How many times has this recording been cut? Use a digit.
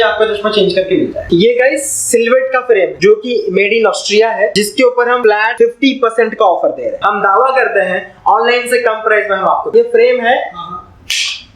5